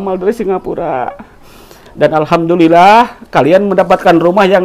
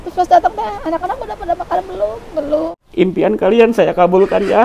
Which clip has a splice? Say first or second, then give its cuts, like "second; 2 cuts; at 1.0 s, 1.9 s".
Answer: second; 1 cut; at 2.8 s